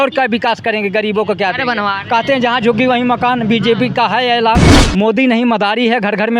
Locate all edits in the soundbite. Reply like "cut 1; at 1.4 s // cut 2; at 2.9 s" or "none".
cut 1; at 4.8 s